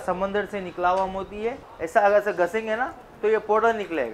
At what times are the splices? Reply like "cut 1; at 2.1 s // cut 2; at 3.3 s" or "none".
cut 1; at 1.7 s

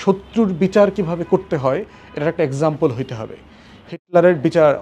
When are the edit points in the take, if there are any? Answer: none

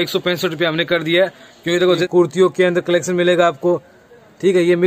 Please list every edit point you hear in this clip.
cut 1; at 2.1 s

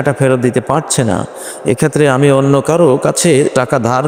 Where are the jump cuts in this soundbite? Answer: none

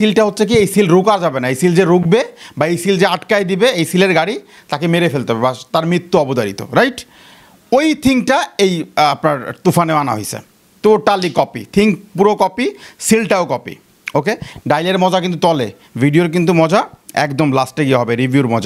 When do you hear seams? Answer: cut 1; at 14.4 s

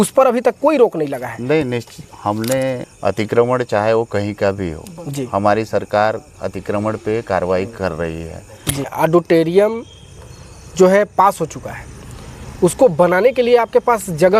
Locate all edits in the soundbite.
cut 1; at 2.9 s // cut 2; at 8.9 s

